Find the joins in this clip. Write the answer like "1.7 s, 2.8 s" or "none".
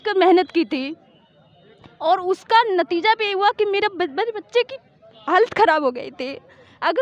none